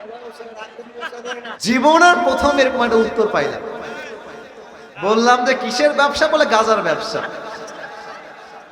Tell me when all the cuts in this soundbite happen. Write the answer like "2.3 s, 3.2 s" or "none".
1.6 s